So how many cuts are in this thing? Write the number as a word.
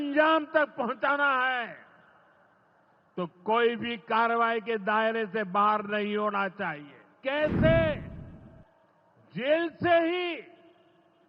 one